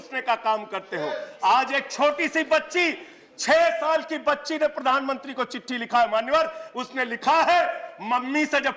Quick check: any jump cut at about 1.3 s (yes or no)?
yes